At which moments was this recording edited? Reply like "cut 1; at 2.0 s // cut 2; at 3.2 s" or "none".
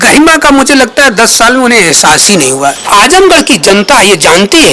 cut 1; at 2.9 s